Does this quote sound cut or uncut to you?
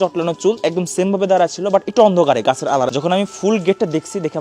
cut